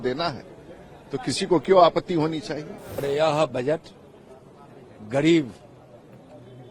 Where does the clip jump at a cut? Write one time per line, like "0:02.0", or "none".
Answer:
0:03.0